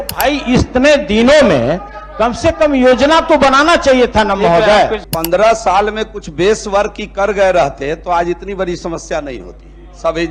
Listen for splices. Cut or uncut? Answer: cut